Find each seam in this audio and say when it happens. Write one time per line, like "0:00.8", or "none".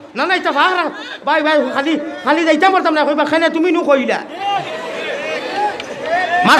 none